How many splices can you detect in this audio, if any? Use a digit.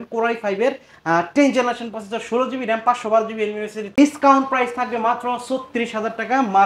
1